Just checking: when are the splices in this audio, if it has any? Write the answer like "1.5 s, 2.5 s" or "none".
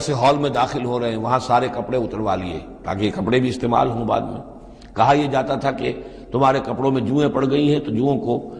none

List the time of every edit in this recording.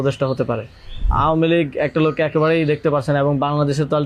1.1 s

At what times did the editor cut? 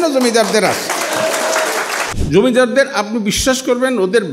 2.1 s

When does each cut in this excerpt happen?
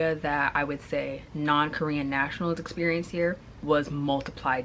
3.5 s

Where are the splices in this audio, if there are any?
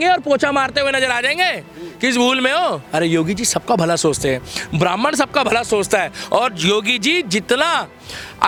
none

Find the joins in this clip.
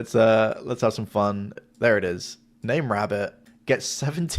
1.6 s, 3.5 s

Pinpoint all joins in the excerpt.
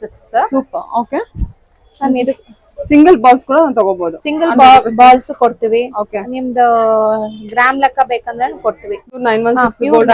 9.2 s

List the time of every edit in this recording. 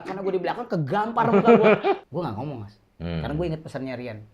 2.1 s

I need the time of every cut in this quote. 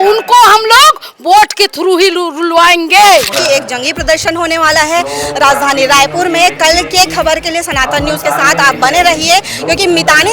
3.3 s

